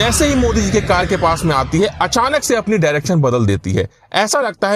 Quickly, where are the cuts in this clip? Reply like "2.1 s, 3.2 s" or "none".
none